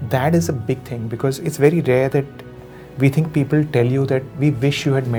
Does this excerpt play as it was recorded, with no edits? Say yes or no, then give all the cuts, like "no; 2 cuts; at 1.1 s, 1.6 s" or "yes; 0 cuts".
yes; 0 cuts